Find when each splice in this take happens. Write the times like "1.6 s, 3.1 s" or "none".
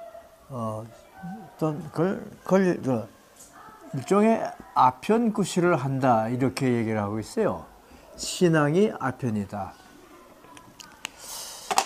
4.1 s